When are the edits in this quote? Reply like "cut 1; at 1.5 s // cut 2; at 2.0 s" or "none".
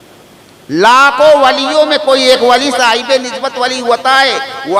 none